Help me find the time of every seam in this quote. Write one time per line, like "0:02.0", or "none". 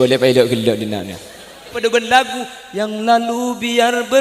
0:01.7